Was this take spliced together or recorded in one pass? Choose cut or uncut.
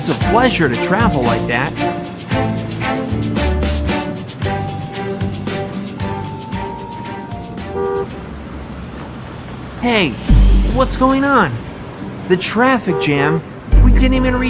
uncut